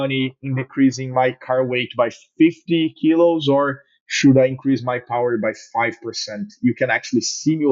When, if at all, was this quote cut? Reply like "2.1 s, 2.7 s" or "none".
none